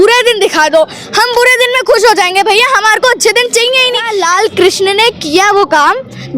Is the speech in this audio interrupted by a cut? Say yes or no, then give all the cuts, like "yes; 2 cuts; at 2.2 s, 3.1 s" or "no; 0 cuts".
yes; 1 cut; at 4.1 s